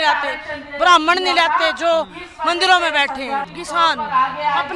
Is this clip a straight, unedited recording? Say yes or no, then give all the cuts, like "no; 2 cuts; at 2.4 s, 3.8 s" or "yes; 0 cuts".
no; 1 cut; at 3.5 s